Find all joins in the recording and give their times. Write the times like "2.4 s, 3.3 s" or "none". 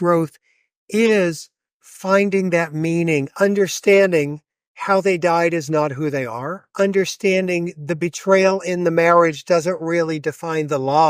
3.3 s, 6.6 s